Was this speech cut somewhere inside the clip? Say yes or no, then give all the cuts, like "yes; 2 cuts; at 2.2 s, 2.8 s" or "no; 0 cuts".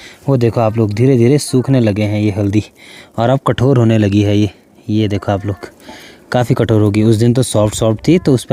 no; 0 cuts